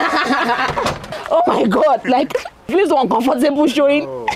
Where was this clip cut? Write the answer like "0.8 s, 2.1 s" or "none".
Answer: 1.1 s, 2.7 s